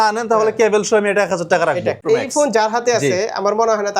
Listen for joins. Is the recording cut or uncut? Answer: cut